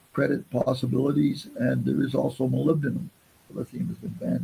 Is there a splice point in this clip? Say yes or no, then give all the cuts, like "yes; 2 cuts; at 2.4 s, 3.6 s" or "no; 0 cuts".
yes; 1 cut; at 3.5 s